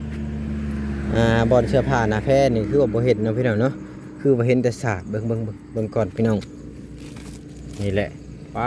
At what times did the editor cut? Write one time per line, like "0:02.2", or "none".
none